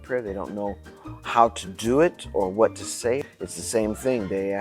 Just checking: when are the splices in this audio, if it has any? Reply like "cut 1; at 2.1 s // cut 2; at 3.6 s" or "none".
cut 1; at 3.2 s